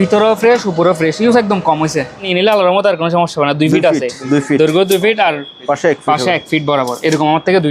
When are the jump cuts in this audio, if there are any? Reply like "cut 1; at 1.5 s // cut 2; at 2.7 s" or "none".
cut 1; at 2.3 s